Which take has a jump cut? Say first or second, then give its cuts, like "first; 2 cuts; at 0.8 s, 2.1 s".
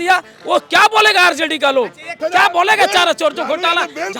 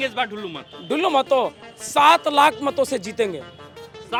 first; 1 cut; at 2.0 s